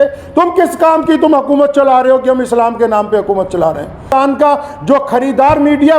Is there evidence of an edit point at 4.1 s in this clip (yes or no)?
yes